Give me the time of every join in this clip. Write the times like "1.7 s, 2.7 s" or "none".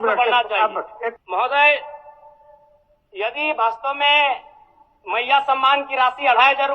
1.2 s